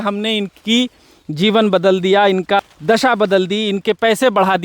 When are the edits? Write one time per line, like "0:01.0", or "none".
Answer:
0:02.6